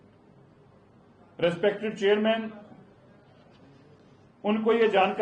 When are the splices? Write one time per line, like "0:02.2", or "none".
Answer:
none